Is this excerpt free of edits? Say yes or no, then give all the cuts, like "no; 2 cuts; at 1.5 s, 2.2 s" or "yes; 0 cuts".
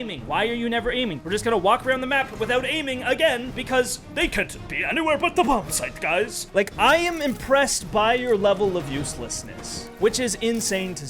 no; 3 cuts; at 1.2 s, 3.5 s, 6.4 s